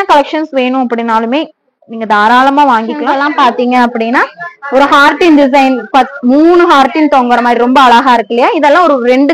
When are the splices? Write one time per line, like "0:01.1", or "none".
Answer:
0:03.1